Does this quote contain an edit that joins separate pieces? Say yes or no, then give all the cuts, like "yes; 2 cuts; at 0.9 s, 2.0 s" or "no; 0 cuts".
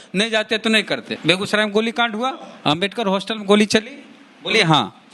yes; 1 cut; at 1.1 s